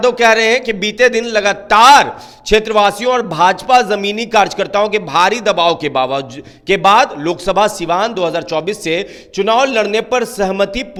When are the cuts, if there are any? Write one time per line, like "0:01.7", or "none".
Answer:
none

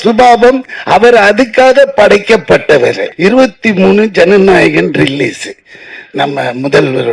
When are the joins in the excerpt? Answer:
0:03.1

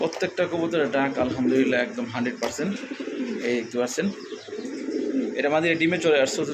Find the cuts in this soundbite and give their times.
none

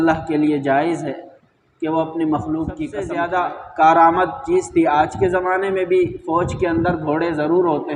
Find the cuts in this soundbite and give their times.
0:03.2

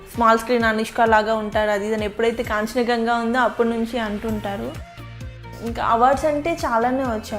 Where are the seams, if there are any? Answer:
0:05.4

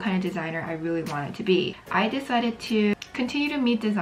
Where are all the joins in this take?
none

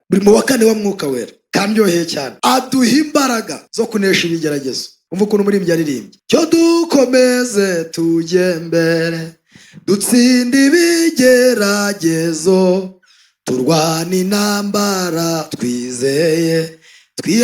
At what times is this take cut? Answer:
none

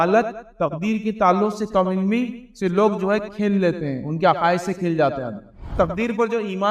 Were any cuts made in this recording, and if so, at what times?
0:05.7

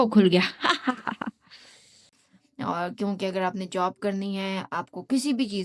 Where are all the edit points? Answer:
0:02.2

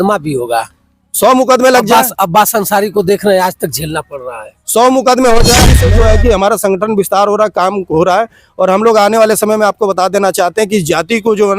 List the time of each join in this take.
0:05.8

